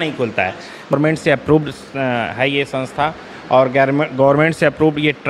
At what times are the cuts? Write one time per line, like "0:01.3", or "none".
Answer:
0:00.9